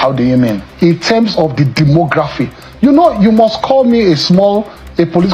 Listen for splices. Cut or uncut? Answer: uncut